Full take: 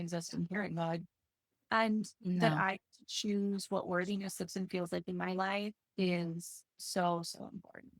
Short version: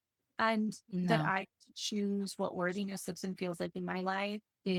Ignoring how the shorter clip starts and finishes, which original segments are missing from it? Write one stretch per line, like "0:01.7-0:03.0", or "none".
none